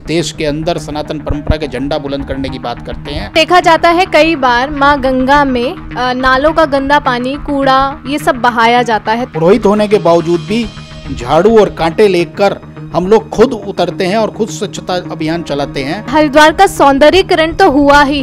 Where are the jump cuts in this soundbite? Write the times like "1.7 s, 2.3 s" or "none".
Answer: 3.3 s, 9.3 s, 16.1 s